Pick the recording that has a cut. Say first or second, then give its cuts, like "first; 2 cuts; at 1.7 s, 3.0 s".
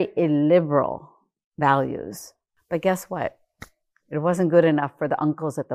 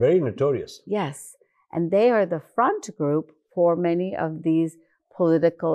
first; 1 cut; at 2.5 s